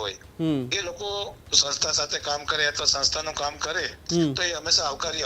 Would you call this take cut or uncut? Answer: uncut